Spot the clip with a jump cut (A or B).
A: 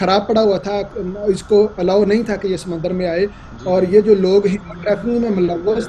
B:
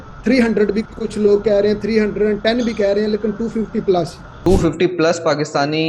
B